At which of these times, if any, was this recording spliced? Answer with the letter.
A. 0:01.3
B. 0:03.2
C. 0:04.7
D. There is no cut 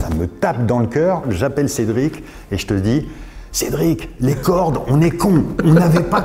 A